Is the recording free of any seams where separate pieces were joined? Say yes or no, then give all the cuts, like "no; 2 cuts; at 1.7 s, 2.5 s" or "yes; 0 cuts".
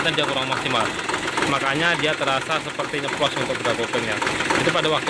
yes; 0 cuts